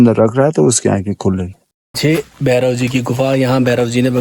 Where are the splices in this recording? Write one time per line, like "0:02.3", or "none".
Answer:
0:02.0